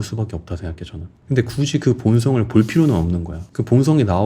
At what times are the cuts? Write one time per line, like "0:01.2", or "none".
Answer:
0:03.3